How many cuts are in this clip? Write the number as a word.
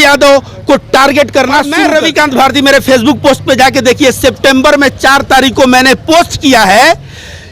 one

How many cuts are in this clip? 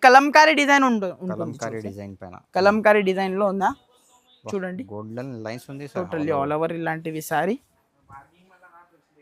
zero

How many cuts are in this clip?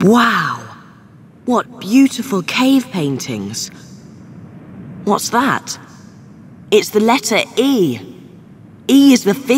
zero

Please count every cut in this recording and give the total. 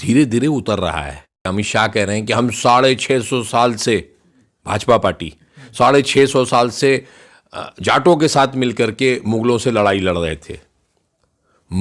one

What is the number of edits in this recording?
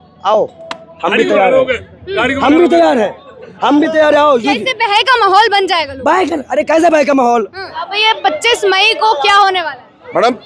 one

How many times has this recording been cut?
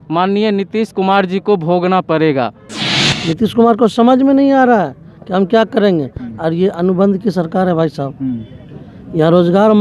one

